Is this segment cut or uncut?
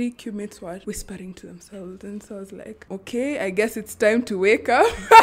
cut